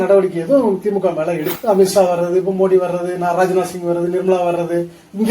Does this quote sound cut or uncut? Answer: cut